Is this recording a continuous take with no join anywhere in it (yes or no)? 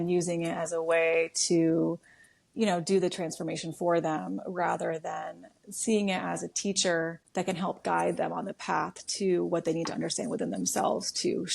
no